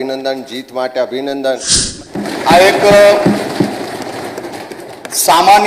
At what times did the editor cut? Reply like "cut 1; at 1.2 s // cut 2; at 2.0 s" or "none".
cut 1; at 1.9 s